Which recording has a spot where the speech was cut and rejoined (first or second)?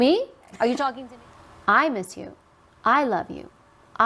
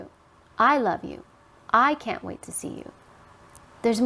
first